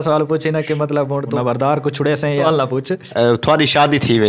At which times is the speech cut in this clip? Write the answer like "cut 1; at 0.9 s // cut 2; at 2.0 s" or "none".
cut 1; at 1.3 s // cut 2; at 2.5 s